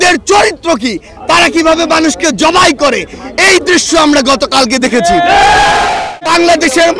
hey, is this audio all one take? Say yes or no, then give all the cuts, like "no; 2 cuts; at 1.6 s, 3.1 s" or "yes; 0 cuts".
no; 1 cut; at 5.9 s